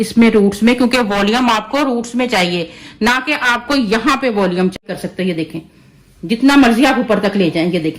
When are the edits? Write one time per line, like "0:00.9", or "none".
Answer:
0:04.8